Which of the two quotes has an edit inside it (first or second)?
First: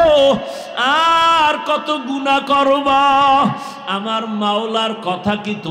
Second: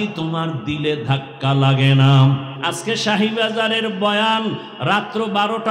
second